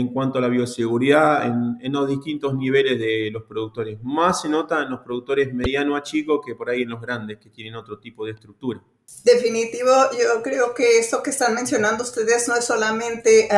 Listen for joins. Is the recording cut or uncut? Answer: uncut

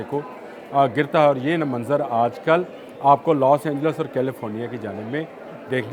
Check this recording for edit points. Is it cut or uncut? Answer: uncut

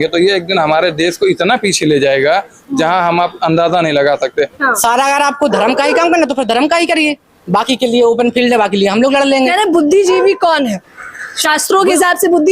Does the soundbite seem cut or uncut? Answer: cut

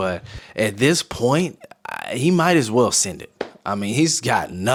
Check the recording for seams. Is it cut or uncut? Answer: uncut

